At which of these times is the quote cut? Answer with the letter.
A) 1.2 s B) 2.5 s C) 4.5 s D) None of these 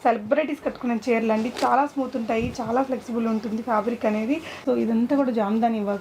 C